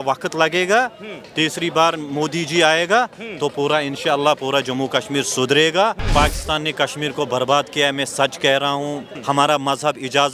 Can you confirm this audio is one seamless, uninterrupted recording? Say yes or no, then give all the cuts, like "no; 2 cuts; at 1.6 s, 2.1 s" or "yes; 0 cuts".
no; 2 cuts; at 6.1 s, 9.1 s